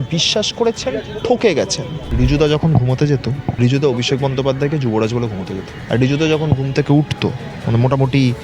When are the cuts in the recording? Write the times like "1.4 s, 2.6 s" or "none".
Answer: 2.0 s, 3.4 s, 5.7 s, 7.5 s